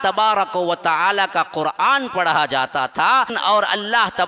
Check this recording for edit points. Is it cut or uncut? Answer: cut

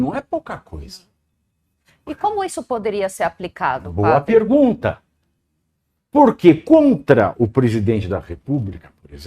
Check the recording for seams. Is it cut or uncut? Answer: uncut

